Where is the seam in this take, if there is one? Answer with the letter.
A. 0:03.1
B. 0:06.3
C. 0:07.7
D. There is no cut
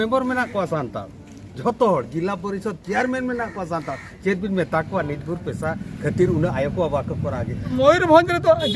C